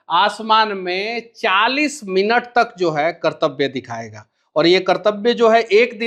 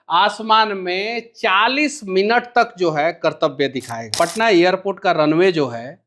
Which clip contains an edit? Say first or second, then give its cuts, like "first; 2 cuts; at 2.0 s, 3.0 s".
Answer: second; 1 cut; at 4.1 s